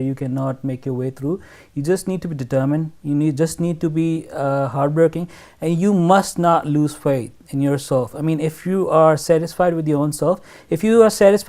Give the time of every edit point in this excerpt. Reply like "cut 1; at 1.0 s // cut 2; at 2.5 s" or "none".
none